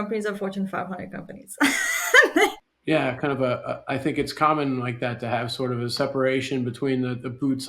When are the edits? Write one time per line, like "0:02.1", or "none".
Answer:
0:02.7